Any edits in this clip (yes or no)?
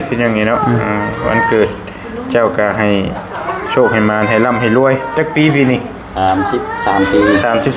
no